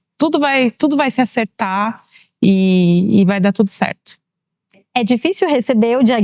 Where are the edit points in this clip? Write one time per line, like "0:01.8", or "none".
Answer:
0:04.8